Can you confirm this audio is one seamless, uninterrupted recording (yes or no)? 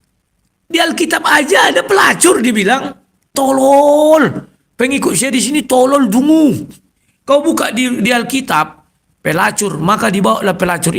no